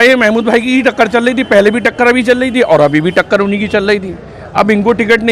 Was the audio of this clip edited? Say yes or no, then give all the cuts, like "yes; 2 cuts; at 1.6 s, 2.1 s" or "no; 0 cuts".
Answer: no; 0 cuts